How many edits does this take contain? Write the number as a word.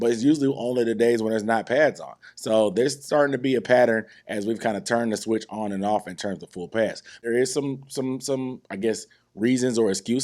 one